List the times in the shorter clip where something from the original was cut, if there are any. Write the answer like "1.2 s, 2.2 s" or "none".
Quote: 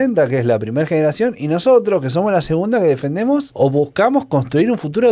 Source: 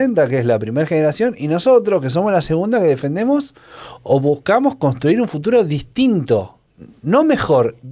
3.5 s